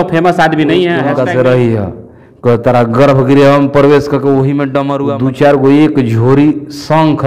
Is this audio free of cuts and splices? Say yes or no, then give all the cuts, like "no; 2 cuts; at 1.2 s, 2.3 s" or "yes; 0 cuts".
no; 2 cuts; at 1.1 s, 5.0 s